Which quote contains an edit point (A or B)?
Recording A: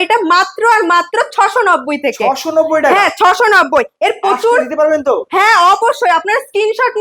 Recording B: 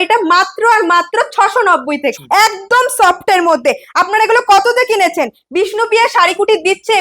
B